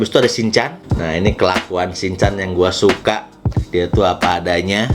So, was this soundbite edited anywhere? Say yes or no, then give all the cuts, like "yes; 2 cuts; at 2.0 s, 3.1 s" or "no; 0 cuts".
yes; 1 cut; at 0.9 s